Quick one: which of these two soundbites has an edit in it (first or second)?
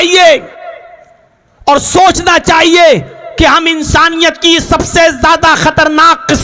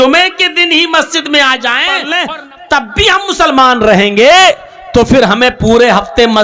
second